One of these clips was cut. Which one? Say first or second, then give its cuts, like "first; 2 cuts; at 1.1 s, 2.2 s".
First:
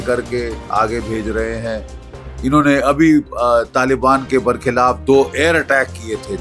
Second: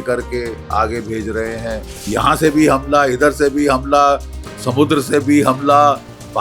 second; 1 cut; at 2.1 s